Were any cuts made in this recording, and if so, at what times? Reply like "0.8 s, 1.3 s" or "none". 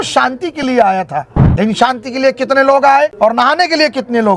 1.4 s, 3.1 s